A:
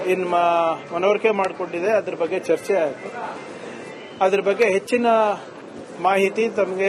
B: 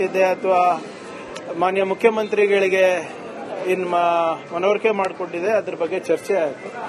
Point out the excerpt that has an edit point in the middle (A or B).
A